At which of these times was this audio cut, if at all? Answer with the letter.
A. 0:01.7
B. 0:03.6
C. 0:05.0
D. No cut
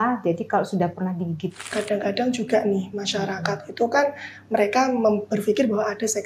A